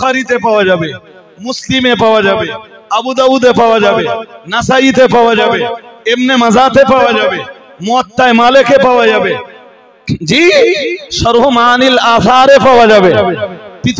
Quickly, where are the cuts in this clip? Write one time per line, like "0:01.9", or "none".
none

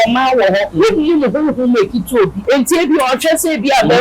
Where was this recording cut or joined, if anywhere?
0:02.4

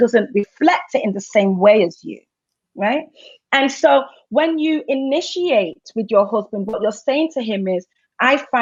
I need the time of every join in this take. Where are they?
none

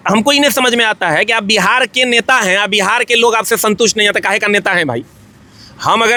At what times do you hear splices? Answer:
none

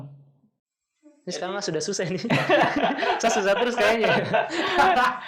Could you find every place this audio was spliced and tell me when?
none

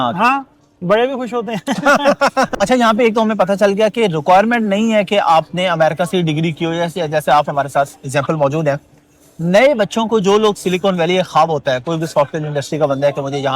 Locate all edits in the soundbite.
0:02.5

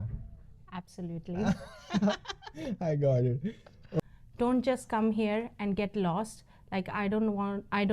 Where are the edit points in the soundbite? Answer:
0:04.0

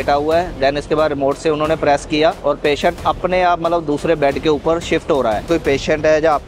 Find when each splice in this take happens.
0:02.4
0:05.4

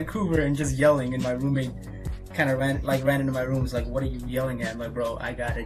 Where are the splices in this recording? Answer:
none

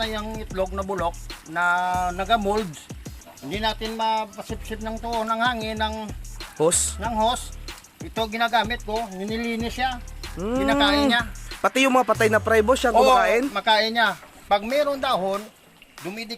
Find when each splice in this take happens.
0:14.3

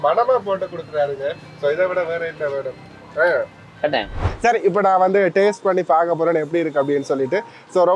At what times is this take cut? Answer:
0:04.2

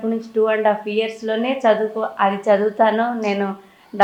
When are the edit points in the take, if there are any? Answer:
none

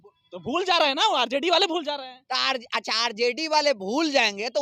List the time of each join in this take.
none

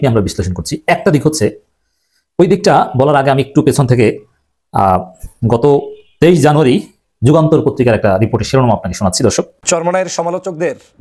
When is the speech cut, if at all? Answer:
0:09.7

